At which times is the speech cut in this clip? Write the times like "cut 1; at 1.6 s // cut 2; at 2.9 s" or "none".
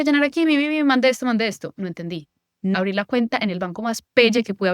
cut 1; at 2.7 s

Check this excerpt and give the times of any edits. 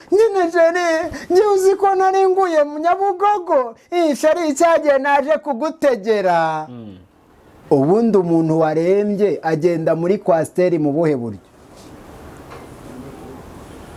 none

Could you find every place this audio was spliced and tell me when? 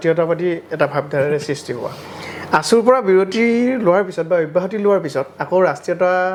none

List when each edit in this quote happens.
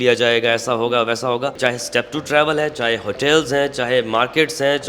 cut 1; at 1.6 s

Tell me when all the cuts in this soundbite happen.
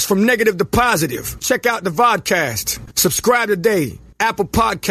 none

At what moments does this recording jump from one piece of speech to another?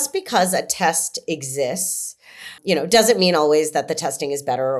cut 1; at 2.6 s

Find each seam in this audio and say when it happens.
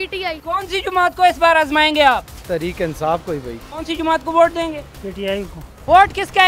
none

